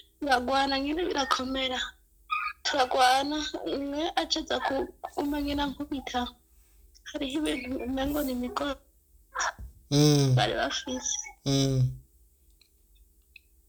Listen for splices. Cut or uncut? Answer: uncut